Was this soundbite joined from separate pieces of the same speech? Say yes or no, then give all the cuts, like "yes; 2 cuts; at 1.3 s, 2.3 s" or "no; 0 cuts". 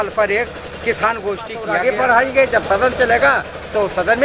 yes; 1 cut; at 1.7 s